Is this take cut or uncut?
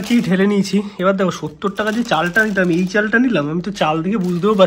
uncut